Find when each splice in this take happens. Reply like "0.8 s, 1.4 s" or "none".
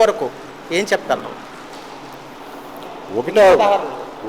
none